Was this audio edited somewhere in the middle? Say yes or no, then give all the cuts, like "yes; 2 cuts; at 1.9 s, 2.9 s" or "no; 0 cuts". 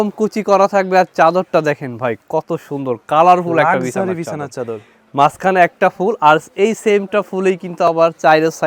no; 0 cuts